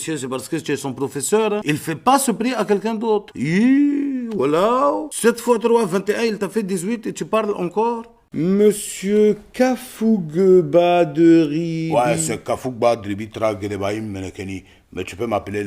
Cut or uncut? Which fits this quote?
cut